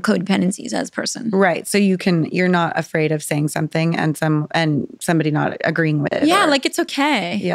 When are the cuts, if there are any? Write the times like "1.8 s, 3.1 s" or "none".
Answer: 6.1 s